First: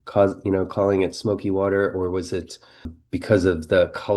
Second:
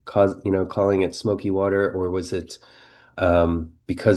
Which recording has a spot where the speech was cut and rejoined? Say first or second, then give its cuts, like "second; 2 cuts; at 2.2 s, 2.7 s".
first; 1 cut; at 3.0 s